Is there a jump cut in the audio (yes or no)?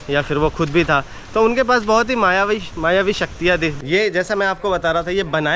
yes